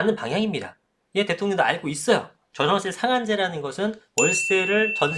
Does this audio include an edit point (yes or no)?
yes